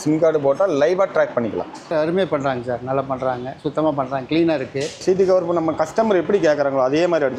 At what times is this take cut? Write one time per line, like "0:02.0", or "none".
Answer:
0:01.9
0:05.0